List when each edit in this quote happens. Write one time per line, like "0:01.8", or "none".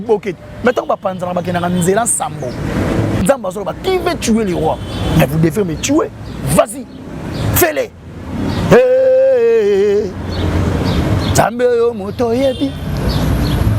0:03.2

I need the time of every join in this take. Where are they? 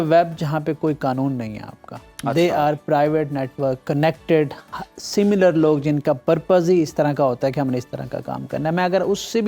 none

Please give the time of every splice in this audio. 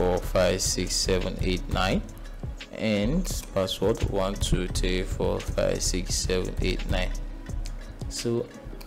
none

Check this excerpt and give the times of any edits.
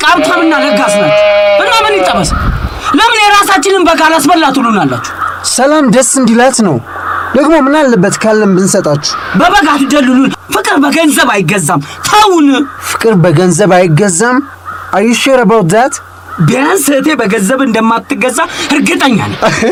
none

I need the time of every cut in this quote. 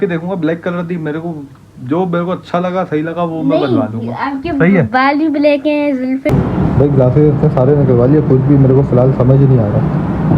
0:06.3

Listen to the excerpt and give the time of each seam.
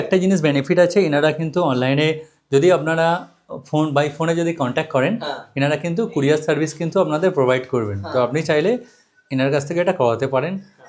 none

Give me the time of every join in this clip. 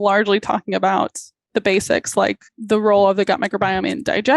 0:01.5
0:02.5

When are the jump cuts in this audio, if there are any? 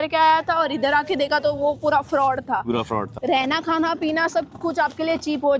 0:03.2

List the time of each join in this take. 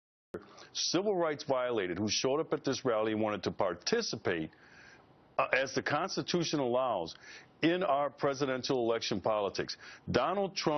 0:01.7

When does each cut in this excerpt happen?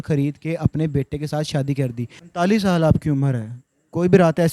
0:02.1

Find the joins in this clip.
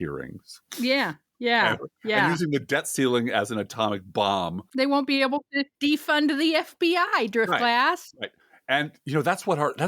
0:04.6
0:05.6

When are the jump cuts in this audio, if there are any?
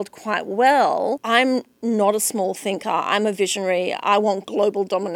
0:01.2

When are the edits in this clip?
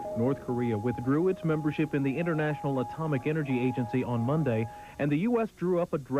0:01.6

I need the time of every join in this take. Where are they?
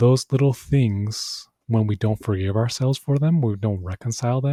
none

